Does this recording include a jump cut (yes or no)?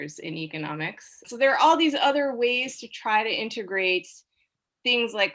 yes